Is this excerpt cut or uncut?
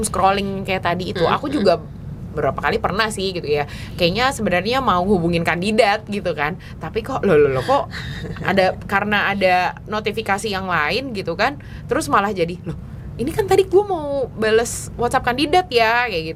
uncut